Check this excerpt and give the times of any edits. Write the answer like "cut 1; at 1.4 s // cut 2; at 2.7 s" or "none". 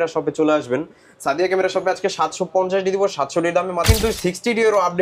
cut 1; at 3.9 s